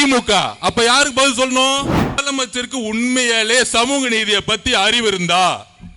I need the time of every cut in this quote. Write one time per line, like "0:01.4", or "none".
0:02.2